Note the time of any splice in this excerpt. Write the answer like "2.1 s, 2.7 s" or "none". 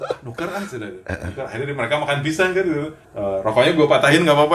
3.0 s